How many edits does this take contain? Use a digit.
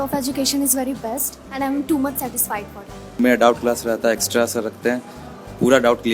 1